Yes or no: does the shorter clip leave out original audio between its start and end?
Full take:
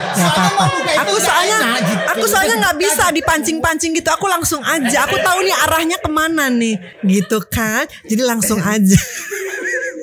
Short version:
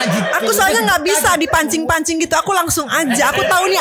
no